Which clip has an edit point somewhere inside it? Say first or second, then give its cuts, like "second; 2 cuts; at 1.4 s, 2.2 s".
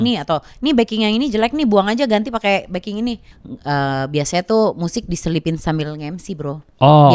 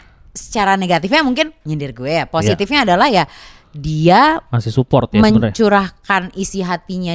first; 1 cut; at 3.3 s